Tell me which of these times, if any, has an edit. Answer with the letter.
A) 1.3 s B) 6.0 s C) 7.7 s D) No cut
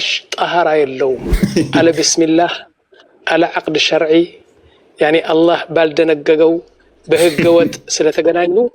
A